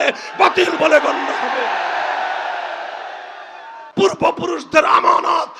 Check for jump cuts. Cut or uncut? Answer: cut